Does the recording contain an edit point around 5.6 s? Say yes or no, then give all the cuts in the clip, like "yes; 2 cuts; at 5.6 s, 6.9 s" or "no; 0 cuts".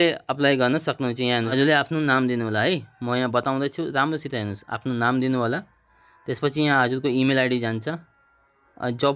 no; 1 cut; at 1.5 s